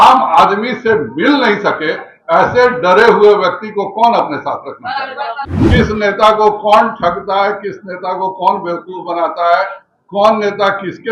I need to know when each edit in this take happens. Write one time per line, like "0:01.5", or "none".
0:05.5